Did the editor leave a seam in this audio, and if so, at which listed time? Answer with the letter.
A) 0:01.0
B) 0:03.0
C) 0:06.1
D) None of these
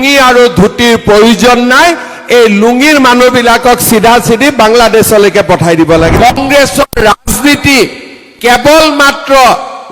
C